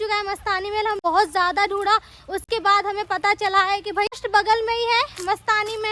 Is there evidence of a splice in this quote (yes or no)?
yes